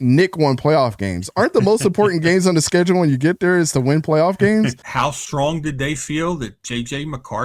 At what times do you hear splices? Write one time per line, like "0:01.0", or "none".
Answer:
0:04.8